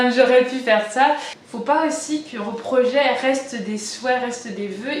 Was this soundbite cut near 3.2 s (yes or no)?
no